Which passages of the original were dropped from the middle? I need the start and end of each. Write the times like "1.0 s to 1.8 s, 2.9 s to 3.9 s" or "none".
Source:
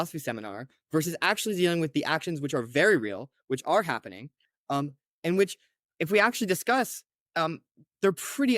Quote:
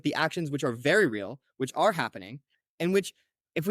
4.5 s to 5.0 s

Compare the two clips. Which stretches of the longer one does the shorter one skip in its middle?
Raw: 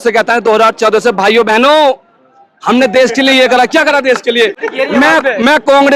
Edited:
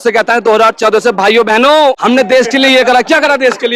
2.0 s to 2.6 s

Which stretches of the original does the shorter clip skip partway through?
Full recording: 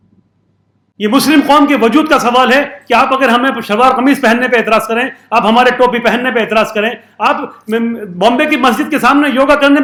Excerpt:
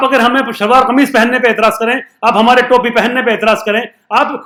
none

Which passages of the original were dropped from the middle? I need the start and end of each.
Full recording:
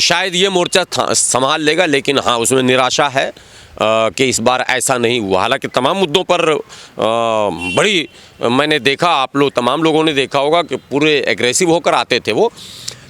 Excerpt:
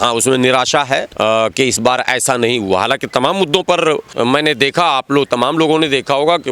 3.3 s to 3.7 s, 6.7 s to 8.3 s

